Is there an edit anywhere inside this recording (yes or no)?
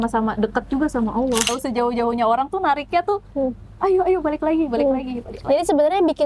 yes